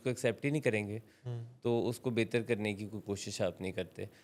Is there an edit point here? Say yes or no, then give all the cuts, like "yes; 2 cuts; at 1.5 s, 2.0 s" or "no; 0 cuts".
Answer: no; 0 cuts